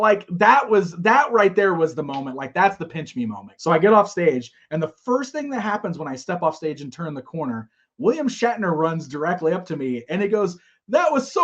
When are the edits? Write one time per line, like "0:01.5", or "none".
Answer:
0:03.5